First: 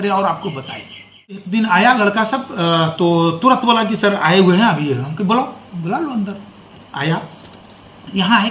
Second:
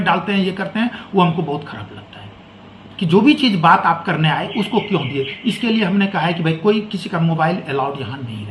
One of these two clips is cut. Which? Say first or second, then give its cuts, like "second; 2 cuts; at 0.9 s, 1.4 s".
first; 1 cut; at 1.5 s